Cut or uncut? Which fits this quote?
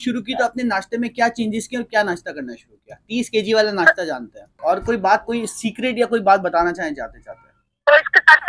cut